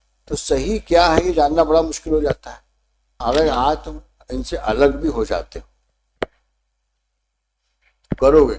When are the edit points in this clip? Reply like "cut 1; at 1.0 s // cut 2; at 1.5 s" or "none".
cut 1; at 3.1 s